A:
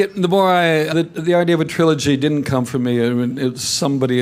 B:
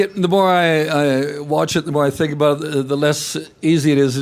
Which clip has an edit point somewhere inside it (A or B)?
B